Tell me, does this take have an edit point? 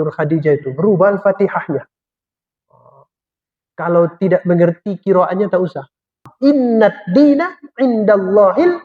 yes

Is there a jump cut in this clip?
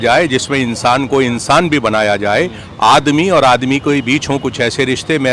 no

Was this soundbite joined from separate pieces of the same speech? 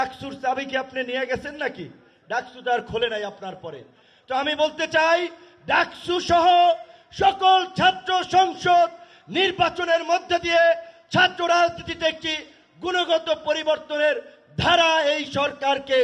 no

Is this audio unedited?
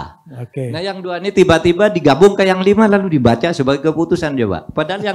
yes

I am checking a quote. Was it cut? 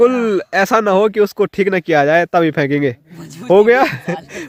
no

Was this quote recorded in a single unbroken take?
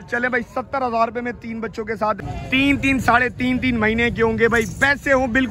no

